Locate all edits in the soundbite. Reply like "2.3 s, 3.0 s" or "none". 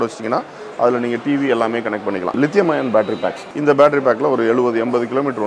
2.3 s, 3.4 s